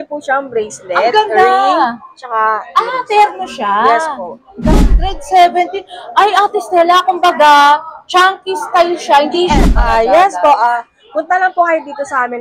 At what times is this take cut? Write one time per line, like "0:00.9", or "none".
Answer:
0:04.9
0:09.6